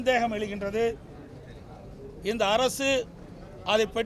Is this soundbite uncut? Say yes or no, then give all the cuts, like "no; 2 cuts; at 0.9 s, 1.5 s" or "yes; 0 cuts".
yes; 0 cuts